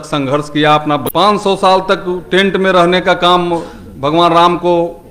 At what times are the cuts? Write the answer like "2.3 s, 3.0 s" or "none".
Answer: 1.0 s